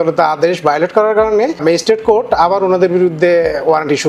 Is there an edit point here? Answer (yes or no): yes